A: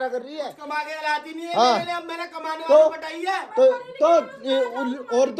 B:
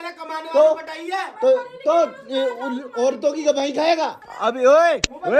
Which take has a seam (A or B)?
B